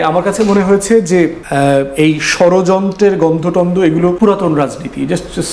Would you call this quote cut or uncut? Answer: cut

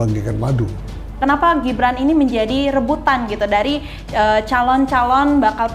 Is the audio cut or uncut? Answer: cut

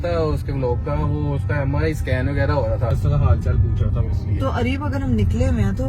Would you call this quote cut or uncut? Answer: cut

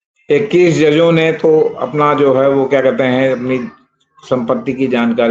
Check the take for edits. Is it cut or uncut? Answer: uncut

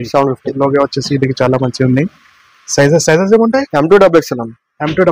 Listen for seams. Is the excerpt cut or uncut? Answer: uncut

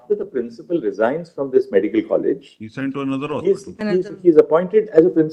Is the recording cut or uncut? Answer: uncut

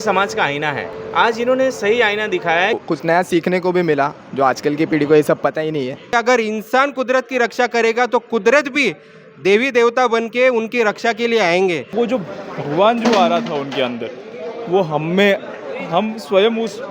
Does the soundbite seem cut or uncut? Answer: cut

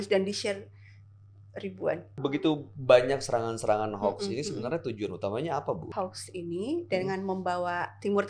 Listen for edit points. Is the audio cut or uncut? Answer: cut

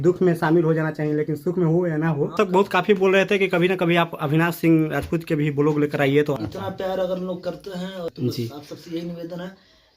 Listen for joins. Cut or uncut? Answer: cut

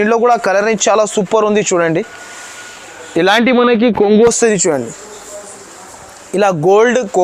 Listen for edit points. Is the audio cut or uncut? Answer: uncut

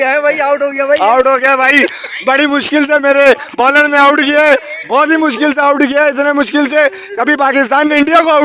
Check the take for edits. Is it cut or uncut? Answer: uncut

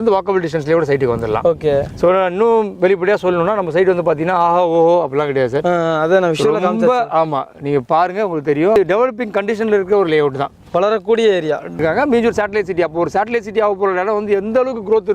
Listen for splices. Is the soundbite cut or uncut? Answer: cut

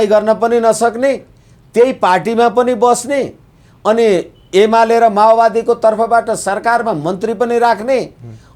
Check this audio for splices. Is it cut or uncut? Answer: uncut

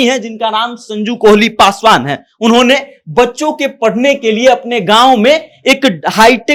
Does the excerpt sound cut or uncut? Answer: uncut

